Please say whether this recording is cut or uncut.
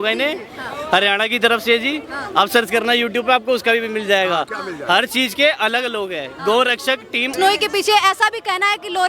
cut